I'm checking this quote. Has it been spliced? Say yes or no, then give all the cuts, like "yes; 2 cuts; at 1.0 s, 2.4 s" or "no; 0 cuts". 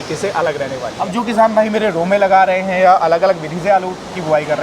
yes; 1 cut; at 0.9 s